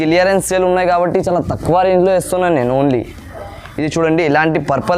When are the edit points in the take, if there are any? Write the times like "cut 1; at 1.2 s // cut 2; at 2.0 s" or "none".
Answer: none